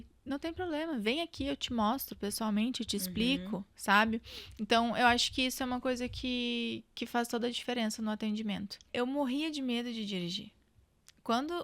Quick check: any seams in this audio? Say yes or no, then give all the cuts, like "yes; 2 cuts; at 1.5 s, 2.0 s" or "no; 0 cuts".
yes; 1 cut; at 8.9 s